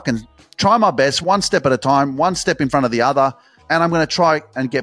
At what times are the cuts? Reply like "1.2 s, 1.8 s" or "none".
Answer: 1.2 s